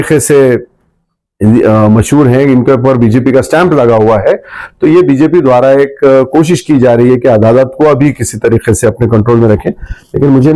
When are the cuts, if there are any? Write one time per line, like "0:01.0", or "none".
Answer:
none